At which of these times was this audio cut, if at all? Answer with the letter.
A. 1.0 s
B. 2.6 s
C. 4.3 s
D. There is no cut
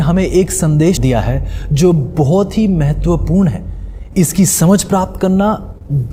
A